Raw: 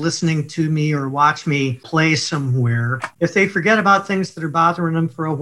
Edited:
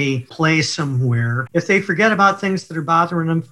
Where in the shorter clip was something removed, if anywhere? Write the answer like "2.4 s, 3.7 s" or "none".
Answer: 1.4 s